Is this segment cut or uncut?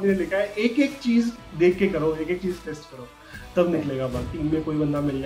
cut